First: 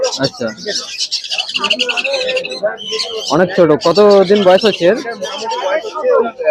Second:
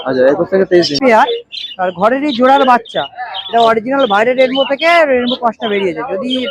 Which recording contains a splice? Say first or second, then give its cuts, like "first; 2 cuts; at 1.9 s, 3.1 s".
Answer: second; 1 cut; at 1.0 s